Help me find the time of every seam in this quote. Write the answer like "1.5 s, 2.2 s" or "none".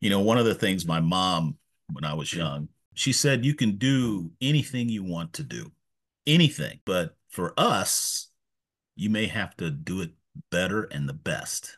2.9 s, 6.8 s